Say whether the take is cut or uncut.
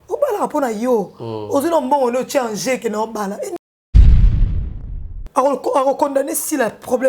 cut